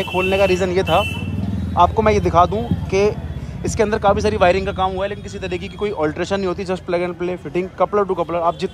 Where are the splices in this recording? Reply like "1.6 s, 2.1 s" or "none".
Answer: none

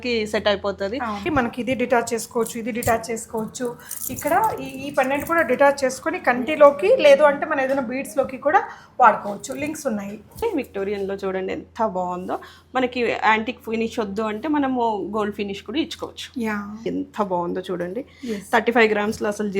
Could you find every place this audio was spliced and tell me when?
1.3 s, 10.4 s, 16.9 s

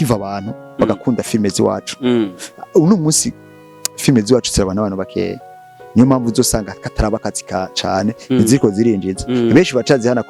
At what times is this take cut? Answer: none

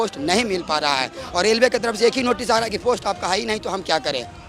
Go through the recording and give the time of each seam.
none

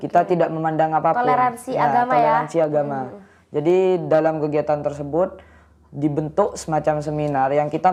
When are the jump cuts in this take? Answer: none

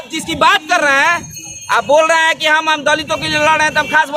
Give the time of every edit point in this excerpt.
none

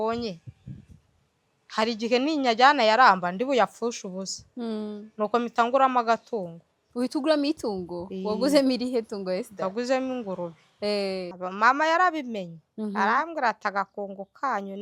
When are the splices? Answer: 11.3 s

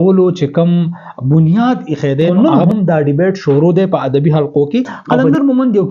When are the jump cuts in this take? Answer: 2.3 s, 5.0 s

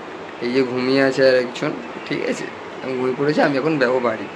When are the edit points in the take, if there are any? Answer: none

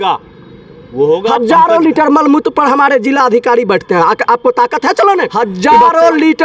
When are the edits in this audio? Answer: 1.3 s, 5.3 s

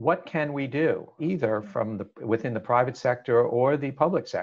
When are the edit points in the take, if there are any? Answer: 1.2 s

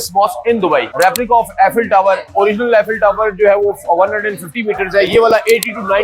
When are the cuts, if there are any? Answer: 0.9 s

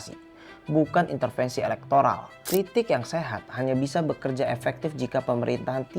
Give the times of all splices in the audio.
2.3 s

